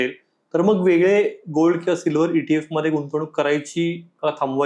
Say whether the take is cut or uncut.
uncut